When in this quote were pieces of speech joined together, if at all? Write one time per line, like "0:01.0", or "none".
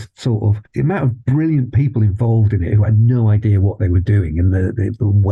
none

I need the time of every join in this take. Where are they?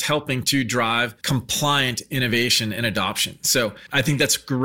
0:01.2
0:03.8

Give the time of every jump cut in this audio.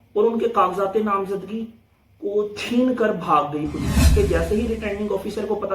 0:04.0

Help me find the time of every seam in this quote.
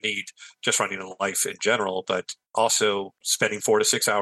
0:02.4
0:03.2

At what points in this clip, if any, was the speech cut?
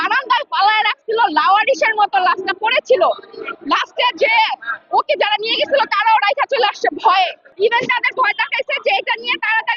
0:07.4

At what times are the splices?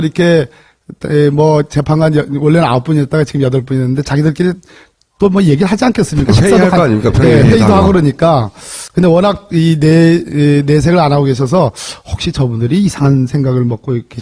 0:02.1

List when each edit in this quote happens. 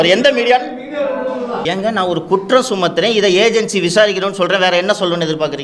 0:01.6

